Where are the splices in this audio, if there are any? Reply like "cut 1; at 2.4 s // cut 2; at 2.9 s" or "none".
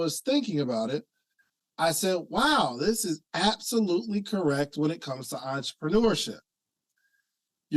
none